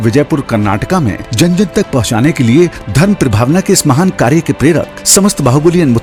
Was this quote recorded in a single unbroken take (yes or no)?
yes